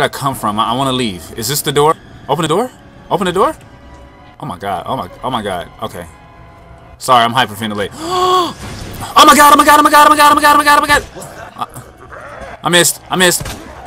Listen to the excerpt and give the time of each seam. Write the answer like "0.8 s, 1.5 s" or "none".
2.5 s